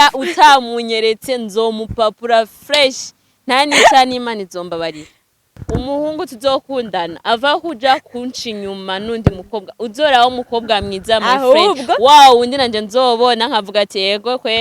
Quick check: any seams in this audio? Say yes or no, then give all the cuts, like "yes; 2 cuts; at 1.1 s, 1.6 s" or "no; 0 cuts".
yes; 1 cut; at 5.6 s